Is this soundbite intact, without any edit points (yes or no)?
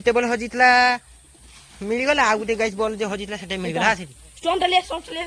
yes